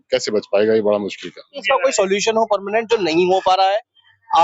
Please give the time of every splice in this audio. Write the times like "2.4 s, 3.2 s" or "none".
1.6 s

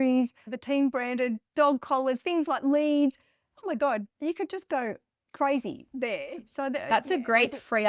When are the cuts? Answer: none

